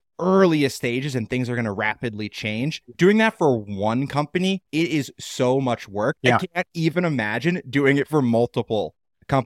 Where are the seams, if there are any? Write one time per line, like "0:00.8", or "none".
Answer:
0:04.6
0:06.2